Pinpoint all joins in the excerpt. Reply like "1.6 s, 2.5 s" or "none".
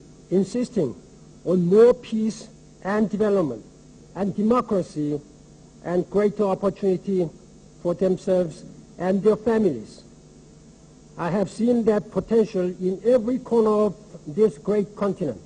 7.4 s

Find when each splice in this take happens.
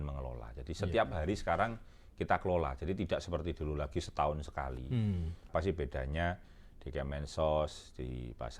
5.4 s

